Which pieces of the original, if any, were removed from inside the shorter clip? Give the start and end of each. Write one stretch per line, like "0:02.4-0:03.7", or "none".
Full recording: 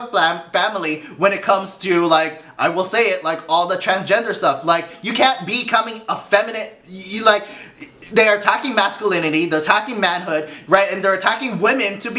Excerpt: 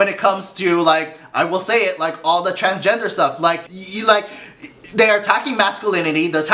0:05.0-0:06.9